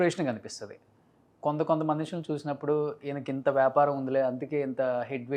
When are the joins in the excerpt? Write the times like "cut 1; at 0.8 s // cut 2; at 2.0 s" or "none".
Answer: none